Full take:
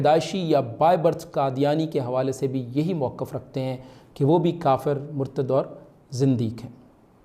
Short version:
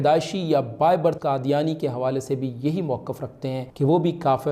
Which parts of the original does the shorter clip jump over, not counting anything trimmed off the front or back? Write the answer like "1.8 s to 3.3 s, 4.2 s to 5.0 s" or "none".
1.2 s to 1.3 s, 3.8 s to 4.1 s